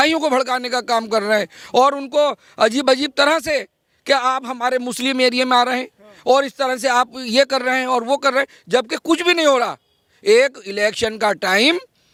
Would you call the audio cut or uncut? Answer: uncut